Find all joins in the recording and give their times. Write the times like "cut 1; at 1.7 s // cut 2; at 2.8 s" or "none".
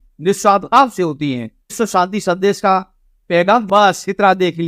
cut 1; at 1.8 s // cut 2; at 3.7 s